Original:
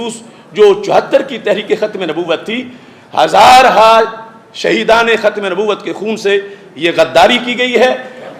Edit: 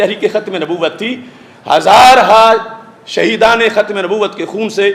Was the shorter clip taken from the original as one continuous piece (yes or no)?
yes